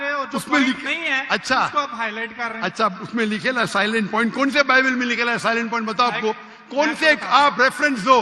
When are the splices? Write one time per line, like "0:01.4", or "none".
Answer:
none